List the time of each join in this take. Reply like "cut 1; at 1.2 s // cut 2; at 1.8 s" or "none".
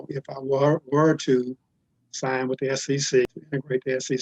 cut 1; at 3.2 s

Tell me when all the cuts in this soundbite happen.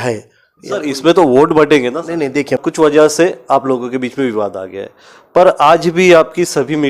cut 1; at 2.6 s

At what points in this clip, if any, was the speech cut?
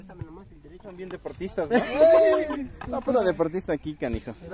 cut 1; at 1.2 s

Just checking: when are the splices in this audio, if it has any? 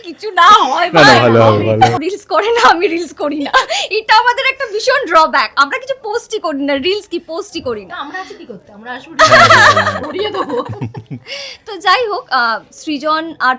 cut 1; at 1.9 s

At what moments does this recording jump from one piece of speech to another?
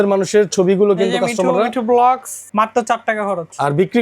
cut 1; at 2.4 s

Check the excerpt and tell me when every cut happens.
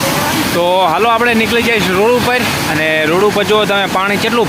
none

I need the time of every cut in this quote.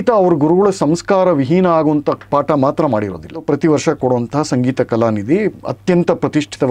cut 1; at 3.4 s

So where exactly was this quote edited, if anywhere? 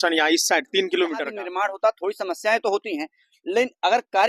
cut 1; at 1.4 s

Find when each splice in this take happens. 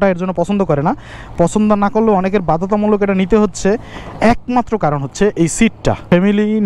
none

